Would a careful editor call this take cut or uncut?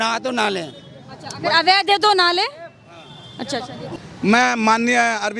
cut